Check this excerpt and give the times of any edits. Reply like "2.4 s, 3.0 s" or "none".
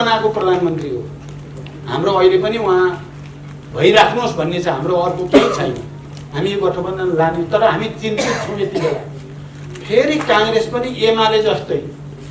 none